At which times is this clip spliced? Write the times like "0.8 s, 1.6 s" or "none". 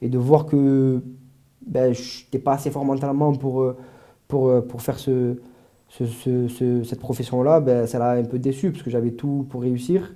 none